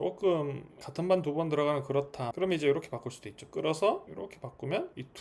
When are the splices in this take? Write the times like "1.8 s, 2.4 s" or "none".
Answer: 2.3 s